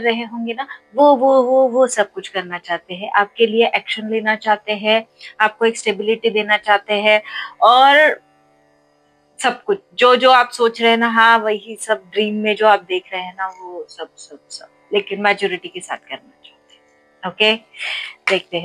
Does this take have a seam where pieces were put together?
no; 0 cuts

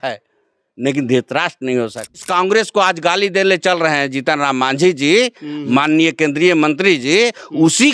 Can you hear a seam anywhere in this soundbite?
yes; 1 cut; at 2.2 s

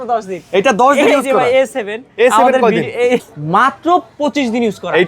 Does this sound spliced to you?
yes; 1 cut; at 3.3 s

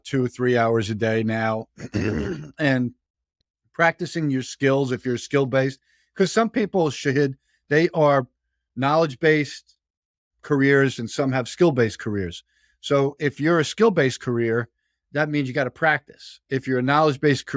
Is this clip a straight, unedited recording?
yes; 0 cuts

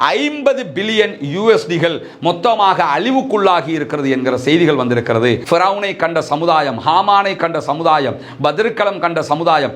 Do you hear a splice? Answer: yes; 1 cut; at 5.4 s

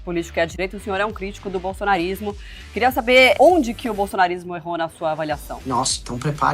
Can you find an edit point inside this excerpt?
yes; 2 cuts; at 3.3 s, 5.5 s

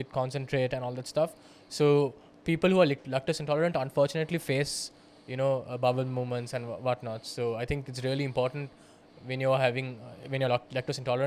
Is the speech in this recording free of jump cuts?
yes; 0 cuts

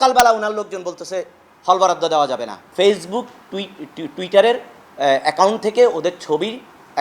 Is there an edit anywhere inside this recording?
yes; 1 cut; at 2.6 s

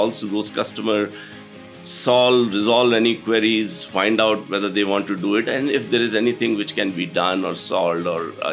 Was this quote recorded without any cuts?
yes; 0 cuts

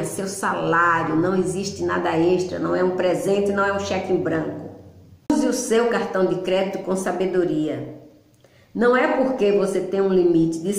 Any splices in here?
yes; 1 cut; at 5.3 s

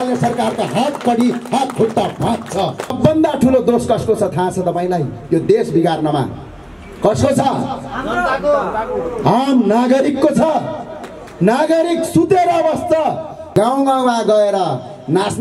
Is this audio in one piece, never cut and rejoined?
no; 2 cuts; at 2.9 s, 13.4 s

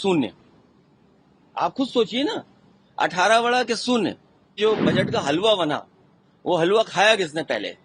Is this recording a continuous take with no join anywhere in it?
no; 1 cut; at 4.6 s

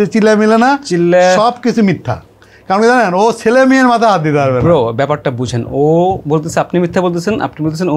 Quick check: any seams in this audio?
no; 0 cuts

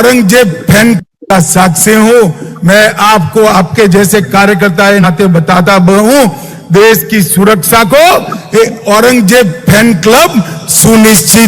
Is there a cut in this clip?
yes; 1 cut; at 1.0 s

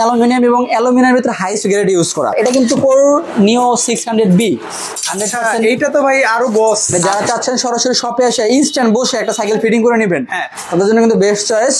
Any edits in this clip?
yes; 2 cuts; at 2.3 s, 6.9 s

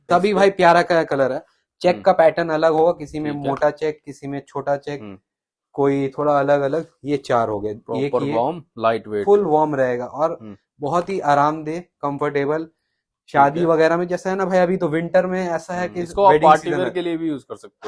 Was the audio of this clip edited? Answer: no; 0 cuts

